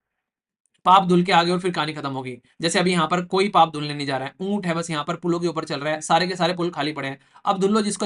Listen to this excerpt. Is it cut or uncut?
uncut